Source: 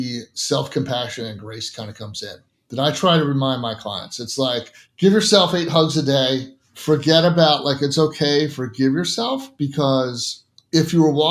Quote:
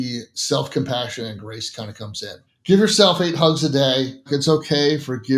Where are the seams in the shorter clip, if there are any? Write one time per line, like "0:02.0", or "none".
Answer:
0:02.5
0:04.3